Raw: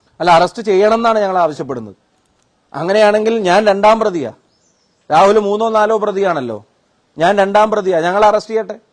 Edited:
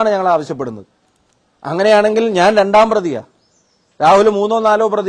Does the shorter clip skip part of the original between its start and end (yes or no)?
no